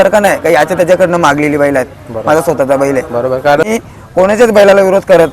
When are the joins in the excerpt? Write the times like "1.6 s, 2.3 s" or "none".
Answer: 3.6 s